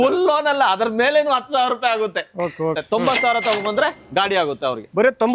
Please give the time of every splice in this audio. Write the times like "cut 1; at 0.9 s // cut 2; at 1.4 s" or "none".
cut 1; at 2.8 s // cut 2; at 4.0 s